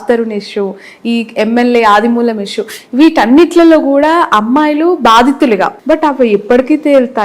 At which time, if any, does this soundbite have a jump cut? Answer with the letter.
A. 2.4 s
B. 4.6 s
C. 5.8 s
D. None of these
C